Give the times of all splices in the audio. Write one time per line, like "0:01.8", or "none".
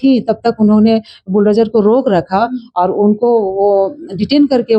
none